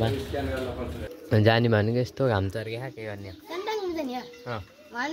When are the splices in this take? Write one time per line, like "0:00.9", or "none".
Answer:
0:01.1